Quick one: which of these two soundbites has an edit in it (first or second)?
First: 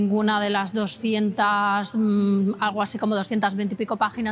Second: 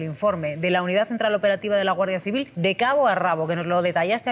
second